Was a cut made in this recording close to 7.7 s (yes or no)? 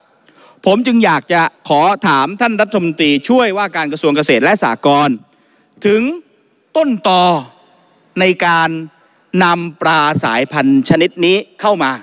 no